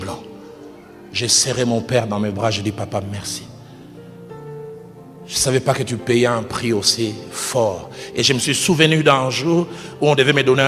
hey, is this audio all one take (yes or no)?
yes